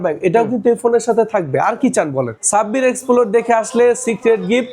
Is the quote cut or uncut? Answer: cut